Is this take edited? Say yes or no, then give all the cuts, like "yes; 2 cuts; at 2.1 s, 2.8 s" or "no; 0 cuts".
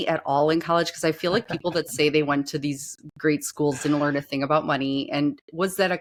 no; 0 cuts